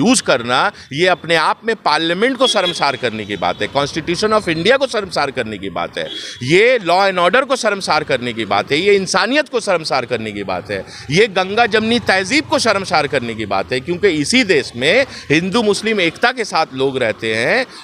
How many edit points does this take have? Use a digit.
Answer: 0